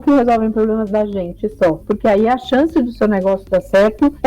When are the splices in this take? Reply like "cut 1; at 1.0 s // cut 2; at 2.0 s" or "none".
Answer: cut 1; at 1.8 s